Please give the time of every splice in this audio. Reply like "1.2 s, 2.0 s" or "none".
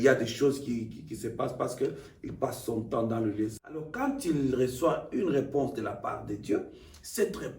3.9 s